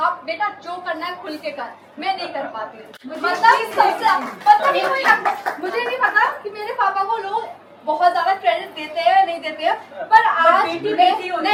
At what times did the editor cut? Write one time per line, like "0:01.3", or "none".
none